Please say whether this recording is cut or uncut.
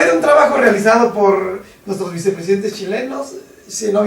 uncut